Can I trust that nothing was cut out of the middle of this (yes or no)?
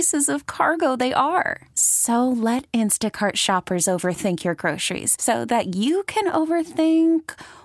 yes